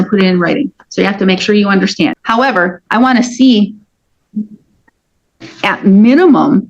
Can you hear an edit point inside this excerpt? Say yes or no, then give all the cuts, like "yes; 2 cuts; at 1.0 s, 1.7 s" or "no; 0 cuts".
yes; 1 cut; at 2.2 s